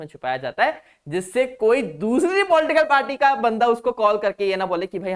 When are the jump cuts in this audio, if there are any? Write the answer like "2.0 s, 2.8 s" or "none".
none